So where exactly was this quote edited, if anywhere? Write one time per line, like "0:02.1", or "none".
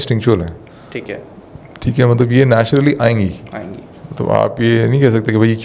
none